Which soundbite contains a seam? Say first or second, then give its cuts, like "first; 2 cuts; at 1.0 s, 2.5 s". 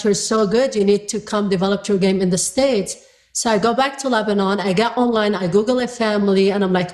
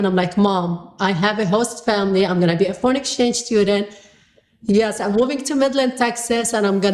first; 1 cut; at 4.9 s